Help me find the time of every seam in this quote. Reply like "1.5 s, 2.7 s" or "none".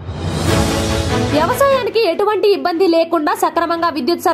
1.3 s